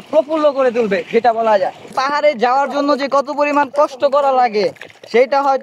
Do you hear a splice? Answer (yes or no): yes